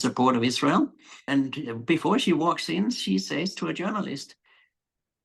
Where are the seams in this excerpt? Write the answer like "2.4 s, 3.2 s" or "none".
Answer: 1.3 s